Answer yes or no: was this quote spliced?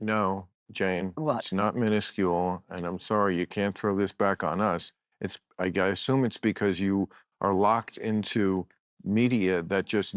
yes